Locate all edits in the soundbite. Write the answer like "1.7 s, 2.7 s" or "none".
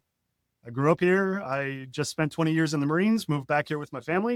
none